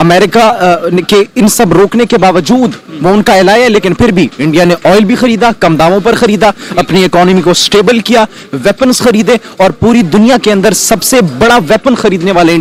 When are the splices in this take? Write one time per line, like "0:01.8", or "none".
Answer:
none